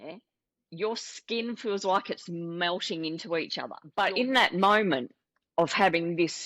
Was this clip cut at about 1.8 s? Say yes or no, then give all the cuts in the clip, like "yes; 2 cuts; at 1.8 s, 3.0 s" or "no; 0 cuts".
no; 1 cut; at 3.8 s